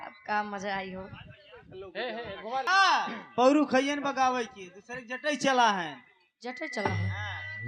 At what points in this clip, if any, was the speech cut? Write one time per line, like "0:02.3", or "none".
0:02.6